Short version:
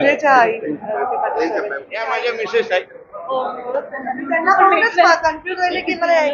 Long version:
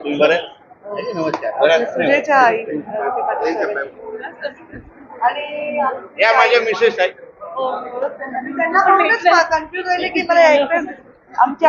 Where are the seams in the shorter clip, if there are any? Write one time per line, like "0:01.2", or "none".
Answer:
0:01.9